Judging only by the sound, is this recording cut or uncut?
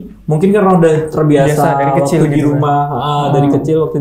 uncut